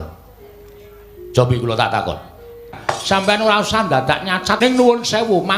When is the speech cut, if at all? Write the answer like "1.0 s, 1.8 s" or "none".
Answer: 2.8 s, 4.6 s